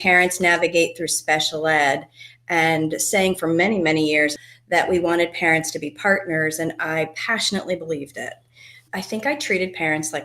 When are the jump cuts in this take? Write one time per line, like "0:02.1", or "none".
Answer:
0:04.4
0:08.8